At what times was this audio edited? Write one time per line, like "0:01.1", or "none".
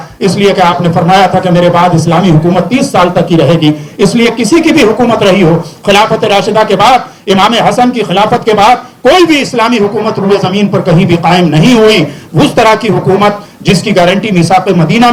none